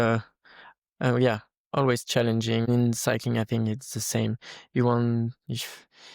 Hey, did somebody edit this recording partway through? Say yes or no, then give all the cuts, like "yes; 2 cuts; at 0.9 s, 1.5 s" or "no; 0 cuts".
yes; 1 cut; at 2.7 s